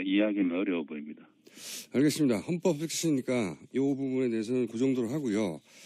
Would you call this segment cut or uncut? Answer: cut